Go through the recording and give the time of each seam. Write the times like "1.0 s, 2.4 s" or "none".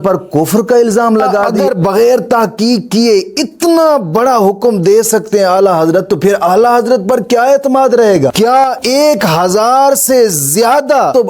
1.4 s